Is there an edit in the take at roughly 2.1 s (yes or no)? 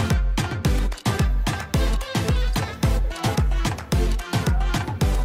no